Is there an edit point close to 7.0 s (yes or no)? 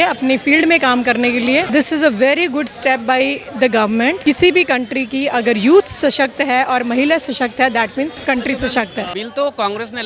no